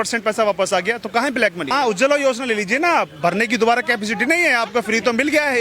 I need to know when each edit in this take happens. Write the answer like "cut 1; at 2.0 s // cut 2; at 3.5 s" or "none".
cut 1; at 1.7 s